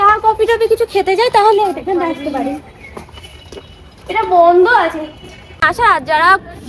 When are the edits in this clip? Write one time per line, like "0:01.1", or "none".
0:05.7